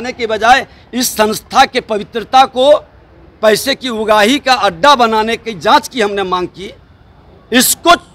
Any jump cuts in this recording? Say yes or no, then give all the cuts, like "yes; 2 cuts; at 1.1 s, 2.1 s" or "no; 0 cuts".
no; 0 cuts